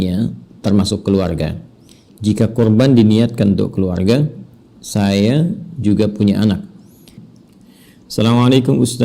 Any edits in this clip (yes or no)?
yes